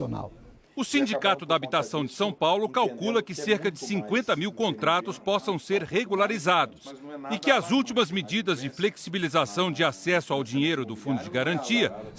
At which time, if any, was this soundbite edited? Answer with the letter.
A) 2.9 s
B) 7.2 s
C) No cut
B